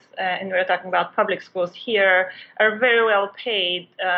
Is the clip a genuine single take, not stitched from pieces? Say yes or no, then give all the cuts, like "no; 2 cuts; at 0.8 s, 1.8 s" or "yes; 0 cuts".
yes; 0 cuts